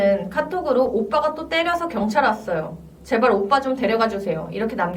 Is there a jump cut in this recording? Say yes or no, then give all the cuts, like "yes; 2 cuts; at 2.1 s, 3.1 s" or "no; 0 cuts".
no; 0 cuts